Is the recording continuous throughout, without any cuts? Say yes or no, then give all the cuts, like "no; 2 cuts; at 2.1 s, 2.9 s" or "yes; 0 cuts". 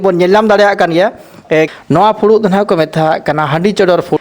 no; 1 cut; at 1.7 s